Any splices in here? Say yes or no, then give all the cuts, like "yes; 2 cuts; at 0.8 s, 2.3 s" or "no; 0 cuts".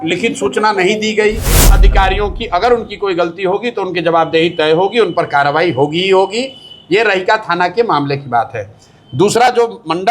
yes; 1 cut; at 1.8 s